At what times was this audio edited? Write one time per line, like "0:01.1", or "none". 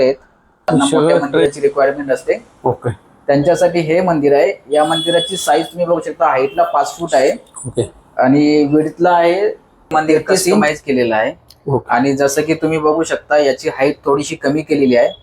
0:01.4
0:10.6